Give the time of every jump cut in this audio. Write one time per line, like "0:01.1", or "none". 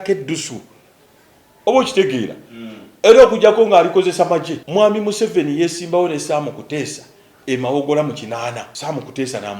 0:04.6
0:08.7